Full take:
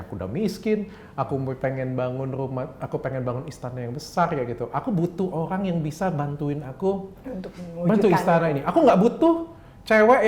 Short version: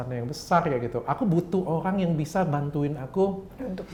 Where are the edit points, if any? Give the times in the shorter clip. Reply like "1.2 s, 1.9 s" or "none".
none